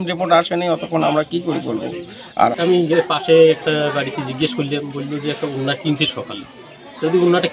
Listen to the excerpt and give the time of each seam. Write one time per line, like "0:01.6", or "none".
0:02.5